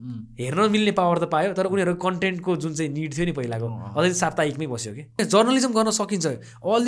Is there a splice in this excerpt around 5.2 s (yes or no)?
yes